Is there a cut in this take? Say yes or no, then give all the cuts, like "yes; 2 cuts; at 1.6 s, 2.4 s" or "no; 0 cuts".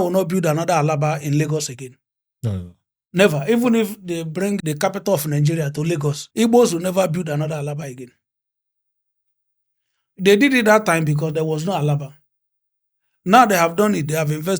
yes; 2 cuts; at 4.6 s, 6.2 s